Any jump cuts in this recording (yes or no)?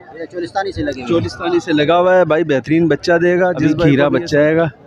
yes